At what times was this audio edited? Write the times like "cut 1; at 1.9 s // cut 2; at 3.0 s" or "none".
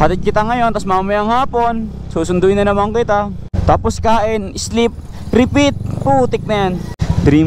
cut 1; at 3.5 s